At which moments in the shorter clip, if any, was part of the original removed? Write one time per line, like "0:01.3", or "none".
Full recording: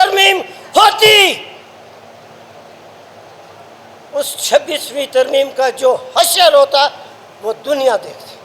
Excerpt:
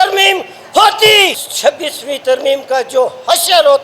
0:01.5